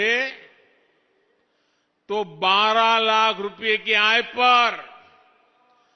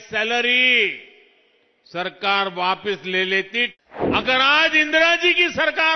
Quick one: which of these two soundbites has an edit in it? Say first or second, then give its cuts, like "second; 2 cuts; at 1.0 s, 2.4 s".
second; 1 cut; at 3.7 s